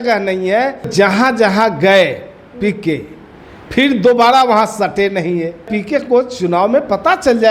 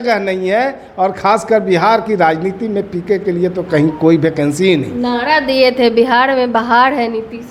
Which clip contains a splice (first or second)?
first